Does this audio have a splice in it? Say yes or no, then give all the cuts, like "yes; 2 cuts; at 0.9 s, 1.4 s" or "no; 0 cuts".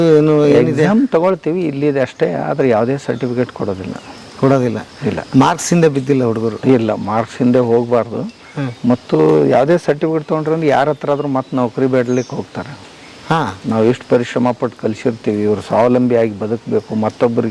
no; 0 cuts